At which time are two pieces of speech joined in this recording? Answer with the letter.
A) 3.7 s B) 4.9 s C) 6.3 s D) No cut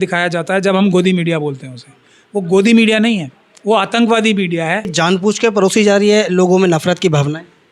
B